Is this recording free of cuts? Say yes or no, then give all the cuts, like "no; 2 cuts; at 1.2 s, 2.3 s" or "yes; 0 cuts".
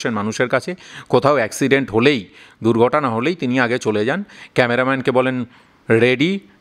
yes; 0 cuts